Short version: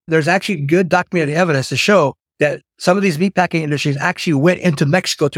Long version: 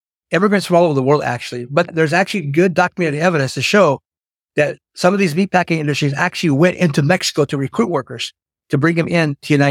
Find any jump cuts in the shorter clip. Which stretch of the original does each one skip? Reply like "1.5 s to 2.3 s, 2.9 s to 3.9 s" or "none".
4.1 s to 4.4 s